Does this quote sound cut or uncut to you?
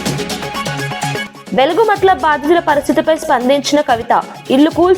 cut